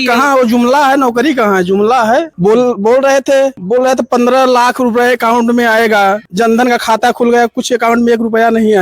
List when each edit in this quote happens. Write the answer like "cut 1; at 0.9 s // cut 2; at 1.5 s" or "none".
cut 1; at 2.3 s // cut 2; at 3.6 s // cut 3; at 6.3 s